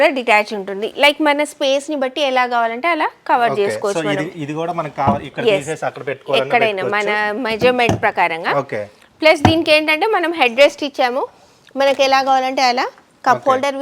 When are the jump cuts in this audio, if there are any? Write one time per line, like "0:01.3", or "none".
none